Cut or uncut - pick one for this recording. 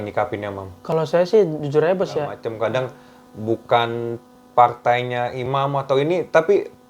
cut